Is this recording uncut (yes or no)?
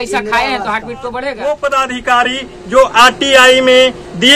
no